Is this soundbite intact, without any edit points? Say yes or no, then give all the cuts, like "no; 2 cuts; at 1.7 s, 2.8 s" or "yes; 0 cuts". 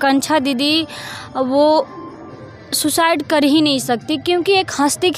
yes; 0 cuts